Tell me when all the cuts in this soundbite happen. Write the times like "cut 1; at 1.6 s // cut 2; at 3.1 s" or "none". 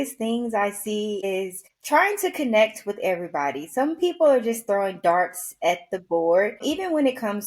cut 1; at 1.3 s // cut 2; at 6.6 s